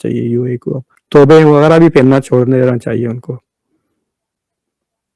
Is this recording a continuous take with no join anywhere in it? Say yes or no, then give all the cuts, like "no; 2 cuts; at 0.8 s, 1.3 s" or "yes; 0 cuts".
no; 1 cut; at 0.9 s